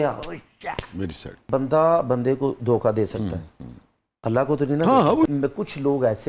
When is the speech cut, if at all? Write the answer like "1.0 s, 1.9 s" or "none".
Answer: 1.4 s, 5.3 s